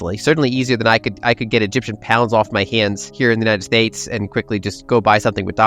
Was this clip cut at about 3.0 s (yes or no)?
yes